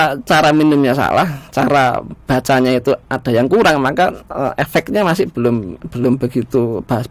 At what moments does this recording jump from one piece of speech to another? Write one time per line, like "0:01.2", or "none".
0:05.8